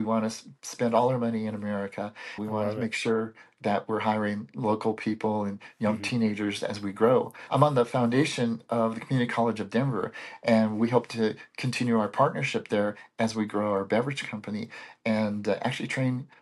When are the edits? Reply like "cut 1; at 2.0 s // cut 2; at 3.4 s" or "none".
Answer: cut 1; at 2.4 s // cut 2; at 7.5 s